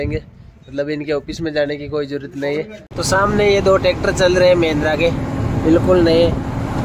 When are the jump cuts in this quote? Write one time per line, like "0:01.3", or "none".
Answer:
0:02.9